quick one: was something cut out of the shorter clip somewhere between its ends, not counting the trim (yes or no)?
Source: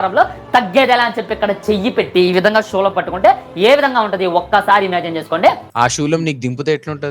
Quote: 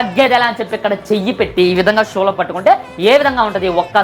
no